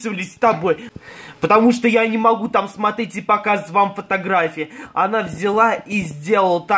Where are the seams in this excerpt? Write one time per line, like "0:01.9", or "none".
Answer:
0:00.9